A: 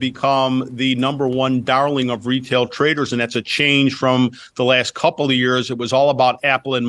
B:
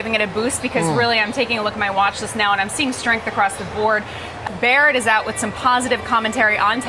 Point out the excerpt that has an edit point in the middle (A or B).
B